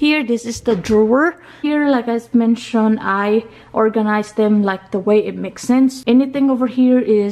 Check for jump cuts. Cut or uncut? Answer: cut